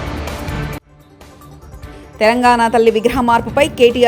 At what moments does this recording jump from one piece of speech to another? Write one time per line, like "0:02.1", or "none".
0:01.0